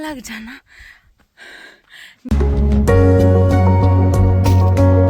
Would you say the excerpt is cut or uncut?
cut